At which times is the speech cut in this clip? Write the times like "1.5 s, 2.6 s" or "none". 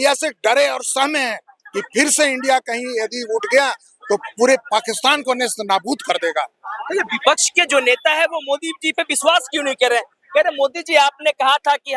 none